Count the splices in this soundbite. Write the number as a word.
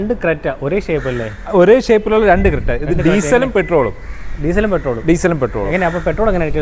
zero